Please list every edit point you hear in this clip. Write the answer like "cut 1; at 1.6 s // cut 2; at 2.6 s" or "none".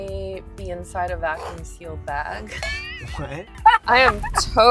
cut 1; at 3.6 s